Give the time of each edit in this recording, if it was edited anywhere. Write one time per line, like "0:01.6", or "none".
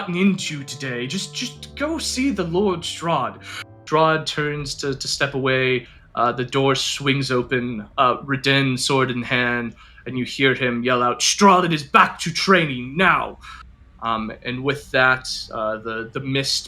0:03.8